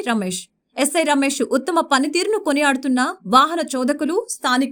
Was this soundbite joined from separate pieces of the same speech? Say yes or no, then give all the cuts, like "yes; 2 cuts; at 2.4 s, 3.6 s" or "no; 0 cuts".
no; 0 cuts